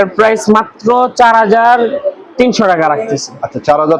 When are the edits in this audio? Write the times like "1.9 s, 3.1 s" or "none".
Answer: none